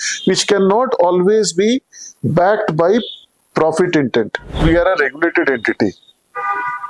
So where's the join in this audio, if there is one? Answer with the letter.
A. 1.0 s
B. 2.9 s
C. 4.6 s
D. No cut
C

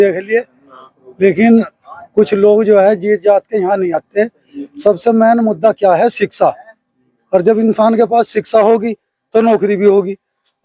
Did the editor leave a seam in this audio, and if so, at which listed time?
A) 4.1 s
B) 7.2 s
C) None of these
C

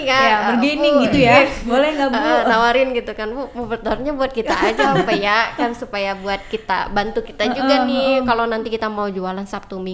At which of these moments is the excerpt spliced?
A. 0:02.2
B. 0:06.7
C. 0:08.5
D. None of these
D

